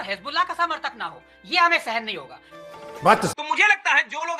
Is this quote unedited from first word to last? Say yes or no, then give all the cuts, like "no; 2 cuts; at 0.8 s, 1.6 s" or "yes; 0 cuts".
no; 1 cut; at 3.3 s